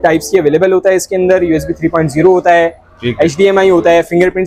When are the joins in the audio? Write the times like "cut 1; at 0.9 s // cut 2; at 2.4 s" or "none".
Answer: none

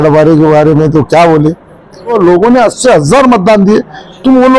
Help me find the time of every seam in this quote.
cut 1; at 2.1 s

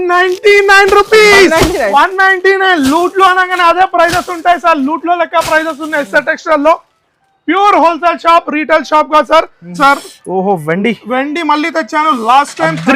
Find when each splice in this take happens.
cut 1; at 9.8 s

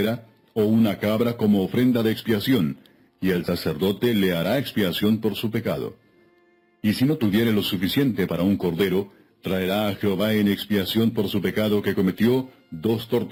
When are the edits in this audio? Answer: none

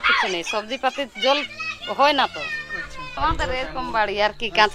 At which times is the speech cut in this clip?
cut 1; at 3.2 s

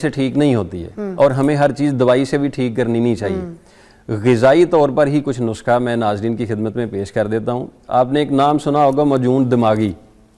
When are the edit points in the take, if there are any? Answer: none

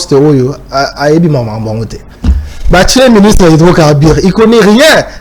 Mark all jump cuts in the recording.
none

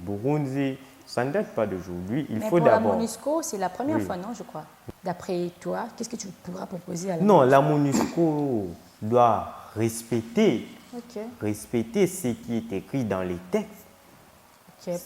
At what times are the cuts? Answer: cut 1; at 4.7 s

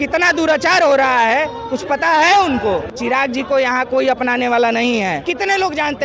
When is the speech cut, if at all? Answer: cut 1; at 2.9 s // cut 2; at 5.2 s

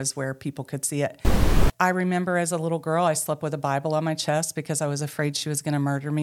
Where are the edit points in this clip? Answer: cut 1; at 1.6 s

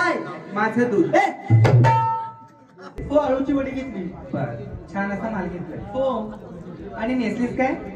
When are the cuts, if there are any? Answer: cut 1; at 3.0 s

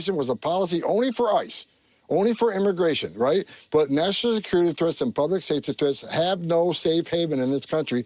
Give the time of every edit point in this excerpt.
none

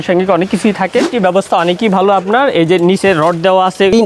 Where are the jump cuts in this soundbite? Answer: cut 1; at 1.1 s

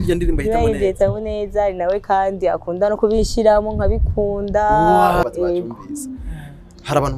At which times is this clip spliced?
cut 1; at 5.2 s

